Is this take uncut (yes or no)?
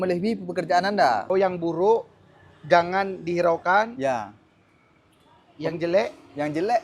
no